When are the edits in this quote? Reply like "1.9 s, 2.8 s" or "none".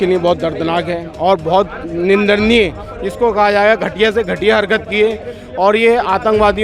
none